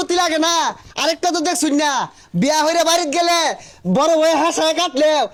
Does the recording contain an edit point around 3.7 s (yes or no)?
no